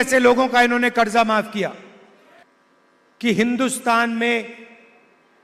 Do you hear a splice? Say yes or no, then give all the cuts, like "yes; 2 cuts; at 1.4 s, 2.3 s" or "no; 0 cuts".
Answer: yes; 1 cut; at 2.4 s